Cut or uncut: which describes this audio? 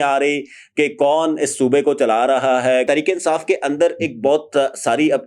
cut